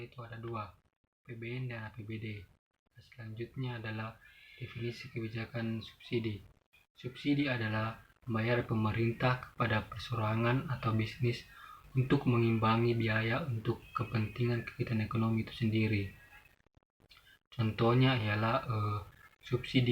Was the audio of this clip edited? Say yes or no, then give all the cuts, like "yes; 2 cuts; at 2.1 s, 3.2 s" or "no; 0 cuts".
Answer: no; 0 cuts